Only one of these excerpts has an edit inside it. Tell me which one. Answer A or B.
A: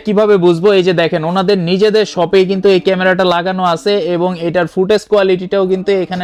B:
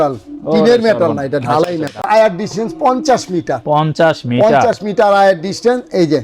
B